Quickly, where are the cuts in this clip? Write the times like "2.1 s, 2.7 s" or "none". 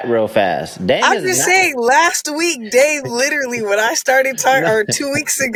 none